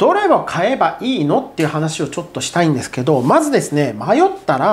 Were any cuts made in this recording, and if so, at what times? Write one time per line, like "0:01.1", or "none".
none